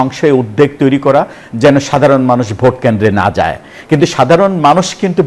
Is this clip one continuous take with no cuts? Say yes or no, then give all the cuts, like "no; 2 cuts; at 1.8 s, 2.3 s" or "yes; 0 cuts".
yes; 0 cuts